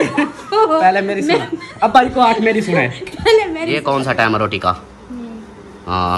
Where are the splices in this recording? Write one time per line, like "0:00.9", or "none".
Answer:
0:03.8